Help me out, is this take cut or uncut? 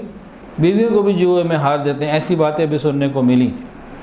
uncut